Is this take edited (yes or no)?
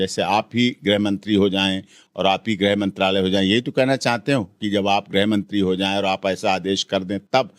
no